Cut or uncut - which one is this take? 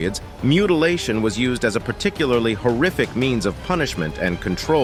uncut